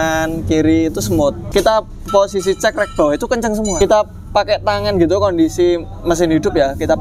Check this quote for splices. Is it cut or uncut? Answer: cut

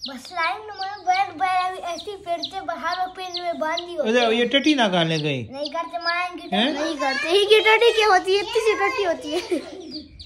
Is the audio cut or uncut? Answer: uncut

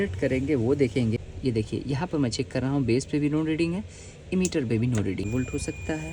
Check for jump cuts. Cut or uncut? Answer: cut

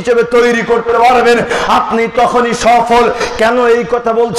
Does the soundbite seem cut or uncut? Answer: uncut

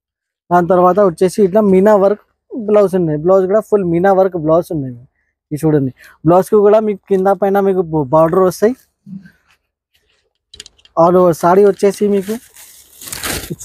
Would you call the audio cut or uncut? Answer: uncut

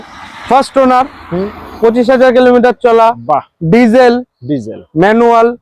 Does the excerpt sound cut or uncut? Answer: uncut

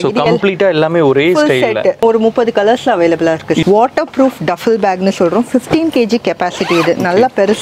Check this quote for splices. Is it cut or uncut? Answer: cut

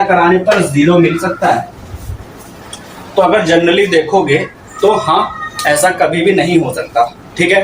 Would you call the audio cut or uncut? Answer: uncut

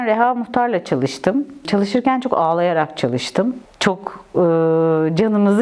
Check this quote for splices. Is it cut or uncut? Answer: cut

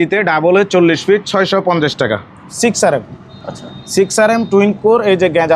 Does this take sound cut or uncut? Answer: cut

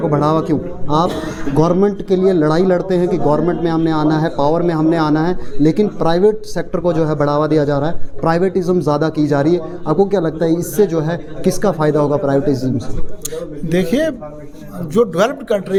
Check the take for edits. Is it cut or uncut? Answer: uncut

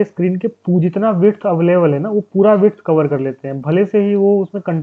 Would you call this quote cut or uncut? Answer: uncut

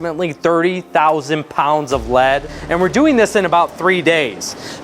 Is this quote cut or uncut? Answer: cut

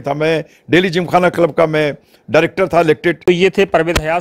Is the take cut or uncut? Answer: cut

